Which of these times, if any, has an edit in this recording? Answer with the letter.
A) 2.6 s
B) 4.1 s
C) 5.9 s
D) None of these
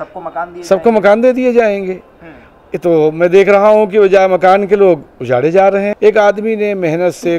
C